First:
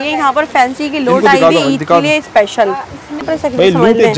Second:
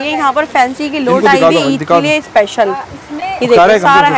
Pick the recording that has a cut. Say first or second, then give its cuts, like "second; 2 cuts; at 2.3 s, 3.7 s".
first; 1 cut; at 3.2 s